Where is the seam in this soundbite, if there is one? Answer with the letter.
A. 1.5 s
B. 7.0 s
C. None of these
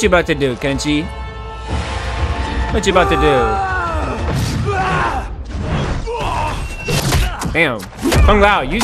B